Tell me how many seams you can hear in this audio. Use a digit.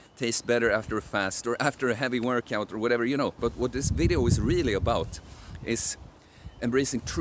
1